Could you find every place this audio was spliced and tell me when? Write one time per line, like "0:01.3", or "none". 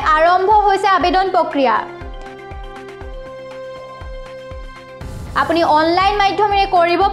0:02.0
0:05.3